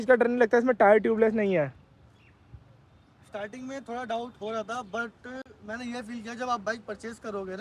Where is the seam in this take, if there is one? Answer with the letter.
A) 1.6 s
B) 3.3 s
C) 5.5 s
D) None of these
D